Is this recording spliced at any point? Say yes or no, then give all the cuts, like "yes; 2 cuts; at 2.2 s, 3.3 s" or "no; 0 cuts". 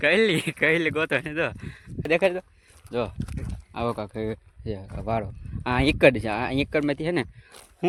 no; 0 cuts